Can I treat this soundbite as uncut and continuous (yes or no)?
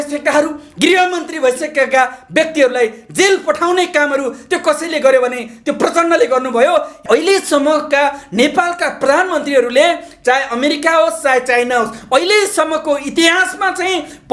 no